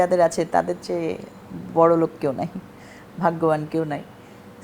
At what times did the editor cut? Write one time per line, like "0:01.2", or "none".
none

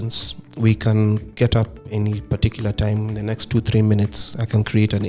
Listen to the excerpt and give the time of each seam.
none

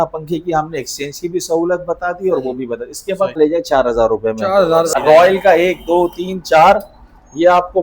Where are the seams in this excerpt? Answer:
0:03.4
0:04.9

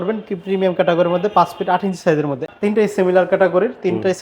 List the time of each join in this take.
0:02.5

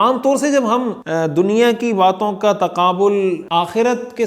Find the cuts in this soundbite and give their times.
0:01.0
0:03.4

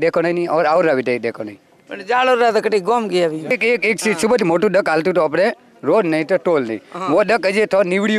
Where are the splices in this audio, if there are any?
0:03.5

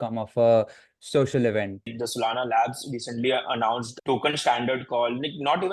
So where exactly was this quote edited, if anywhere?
0:01.9
0:03.9

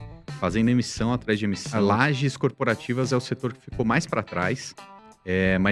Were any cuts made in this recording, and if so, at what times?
0:01.6

